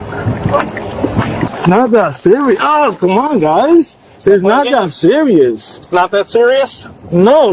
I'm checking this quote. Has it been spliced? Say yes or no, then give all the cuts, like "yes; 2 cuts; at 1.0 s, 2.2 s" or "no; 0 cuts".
yes; 2 cuts; at 1.5 s, 4.0 s